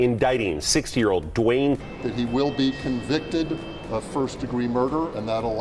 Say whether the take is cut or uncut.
cut